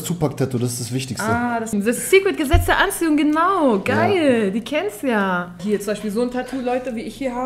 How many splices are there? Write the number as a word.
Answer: two